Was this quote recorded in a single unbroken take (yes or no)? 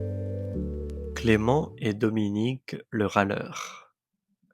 no